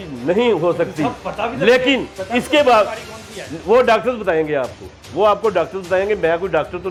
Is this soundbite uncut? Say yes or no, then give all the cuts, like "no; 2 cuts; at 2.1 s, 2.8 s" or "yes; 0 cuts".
yes; 0 cuts